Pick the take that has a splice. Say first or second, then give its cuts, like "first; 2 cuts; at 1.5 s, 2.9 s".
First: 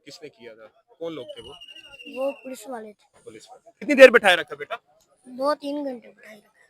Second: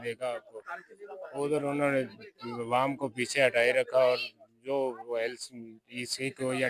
first; 1 cut; at 3.9 s